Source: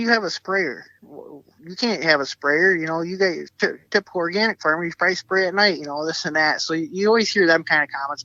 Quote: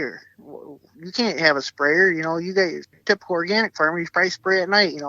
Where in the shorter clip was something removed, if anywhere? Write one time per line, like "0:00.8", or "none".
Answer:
0:02.9